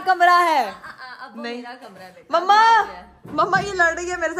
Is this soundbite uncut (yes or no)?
yes